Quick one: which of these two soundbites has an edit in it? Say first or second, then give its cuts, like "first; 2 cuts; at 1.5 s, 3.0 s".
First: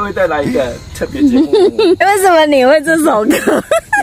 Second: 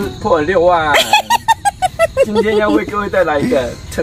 first; 1 cut; at 2.0 s